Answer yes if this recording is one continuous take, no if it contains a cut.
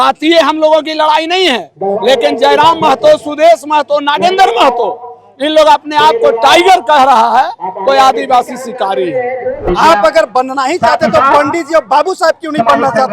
no